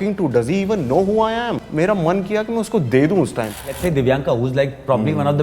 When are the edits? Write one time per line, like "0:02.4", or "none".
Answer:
0:01.7
0:03.6